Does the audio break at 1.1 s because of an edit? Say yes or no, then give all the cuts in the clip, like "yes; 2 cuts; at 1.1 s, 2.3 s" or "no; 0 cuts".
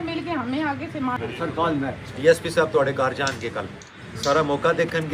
yes; 2 cuts; at 1.1 s, 3.8 s